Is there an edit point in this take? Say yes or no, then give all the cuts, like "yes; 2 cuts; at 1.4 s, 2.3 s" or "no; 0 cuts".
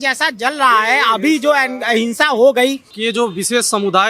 yes; 1 cut; at 2.9 s